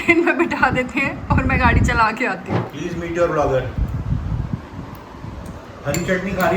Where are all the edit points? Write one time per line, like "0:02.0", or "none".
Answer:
0:02.6